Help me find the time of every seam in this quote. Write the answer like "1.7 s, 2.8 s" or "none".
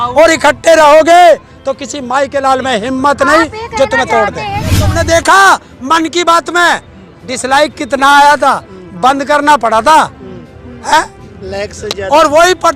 4.8 s

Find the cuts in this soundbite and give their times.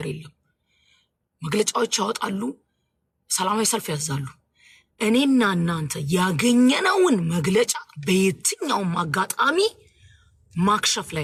none

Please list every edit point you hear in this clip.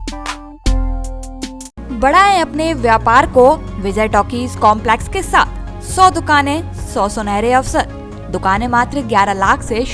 none

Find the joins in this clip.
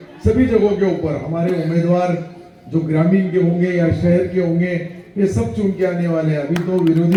none

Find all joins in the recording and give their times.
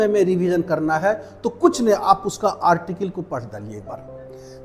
none

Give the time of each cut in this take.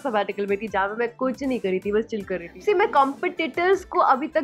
2.5 s

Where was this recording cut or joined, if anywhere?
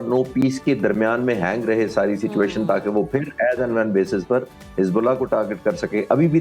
none

